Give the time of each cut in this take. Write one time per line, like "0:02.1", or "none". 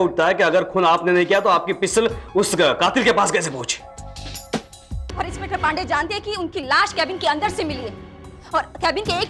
0:04.9